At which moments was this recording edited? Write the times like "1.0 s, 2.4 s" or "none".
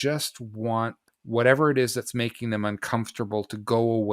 1.1 s